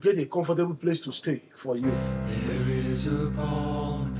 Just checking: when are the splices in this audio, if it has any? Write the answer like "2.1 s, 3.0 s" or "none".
1.9 s